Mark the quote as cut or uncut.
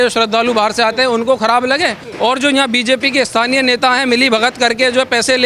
cut